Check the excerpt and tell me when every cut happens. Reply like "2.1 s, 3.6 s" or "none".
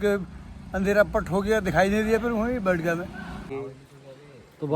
3.5 s